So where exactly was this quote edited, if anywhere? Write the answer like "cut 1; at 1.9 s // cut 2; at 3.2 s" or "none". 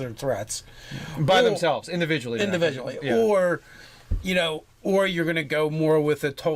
none